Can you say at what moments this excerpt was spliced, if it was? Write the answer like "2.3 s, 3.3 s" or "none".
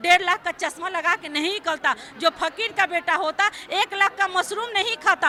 none